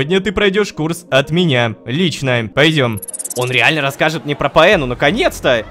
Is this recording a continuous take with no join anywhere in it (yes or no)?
no